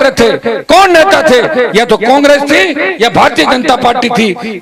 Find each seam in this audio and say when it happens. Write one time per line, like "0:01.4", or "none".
none